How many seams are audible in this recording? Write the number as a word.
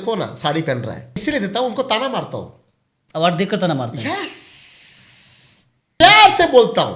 two